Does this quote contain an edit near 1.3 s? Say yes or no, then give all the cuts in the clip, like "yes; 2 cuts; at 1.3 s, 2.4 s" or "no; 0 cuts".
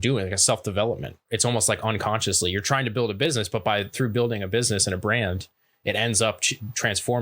yes; 1 cut; at 1.3 s